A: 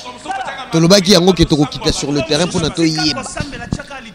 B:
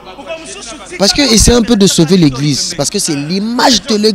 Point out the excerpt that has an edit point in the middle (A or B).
B